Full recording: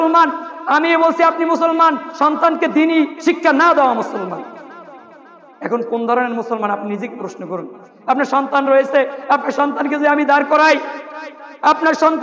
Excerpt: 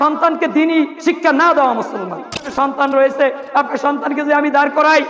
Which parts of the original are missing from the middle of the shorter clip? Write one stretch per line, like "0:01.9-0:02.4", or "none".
0:04.7-0:08.3

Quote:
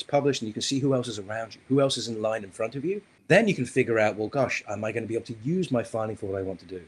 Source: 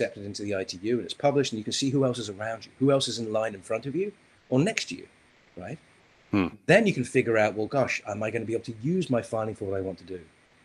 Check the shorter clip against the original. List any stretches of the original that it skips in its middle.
0:04.3-0:06.6

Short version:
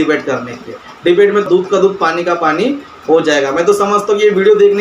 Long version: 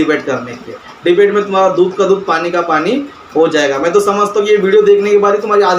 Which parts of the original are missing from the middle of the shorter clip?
0:01.5-0:01.7

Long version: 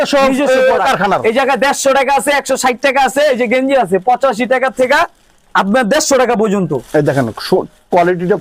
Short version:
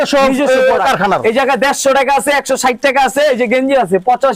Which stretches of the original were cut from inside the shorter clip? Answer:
none

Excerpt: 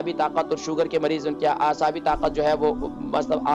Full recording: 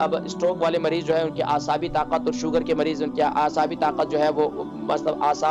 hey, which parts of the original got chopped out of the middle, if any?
none

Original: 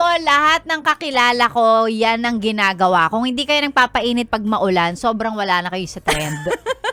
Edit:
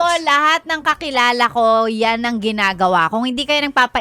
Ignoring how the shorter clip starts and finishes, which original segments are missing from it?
none

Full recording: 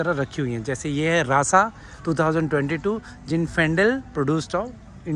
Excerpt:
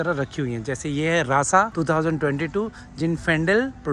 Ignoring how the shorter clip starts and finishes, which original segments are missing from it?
0:01.7-0:02.0

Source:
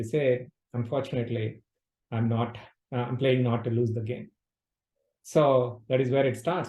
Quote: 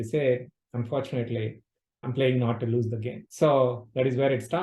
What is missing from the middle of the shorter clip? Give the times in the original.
0:02.1-0:03.1
0:04.2-0:05.1

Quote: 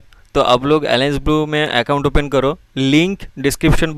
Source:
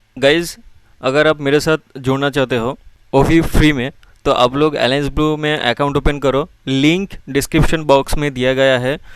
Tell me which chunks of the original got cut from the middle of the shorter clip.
none

